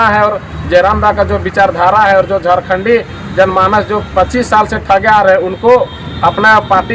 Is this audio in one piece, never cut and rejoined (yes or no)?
yes